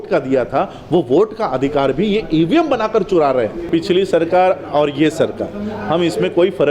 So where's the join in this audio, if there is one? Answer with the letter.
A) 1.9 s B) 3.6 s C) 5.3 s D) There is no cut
B